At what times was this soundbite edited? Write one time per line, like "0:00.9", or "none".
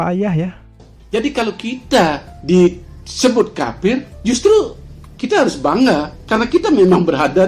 0:01.0